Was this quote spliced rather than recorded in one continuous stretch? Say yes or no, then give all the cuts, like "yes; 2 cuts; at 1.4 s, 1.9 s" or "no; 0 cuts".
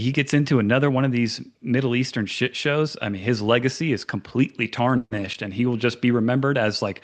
no; 0 cuts